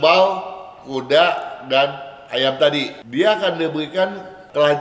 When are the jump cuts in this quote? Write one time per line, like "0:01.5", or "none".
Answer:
0:03.0

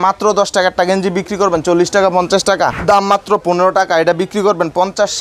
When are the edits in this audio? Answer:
none

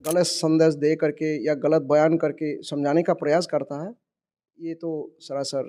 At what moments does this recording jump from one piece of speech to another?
none

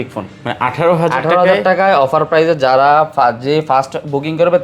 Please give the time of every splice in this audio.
none

